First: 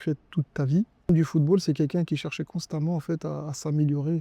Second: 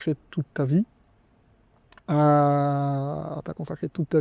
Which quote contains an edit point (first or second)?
first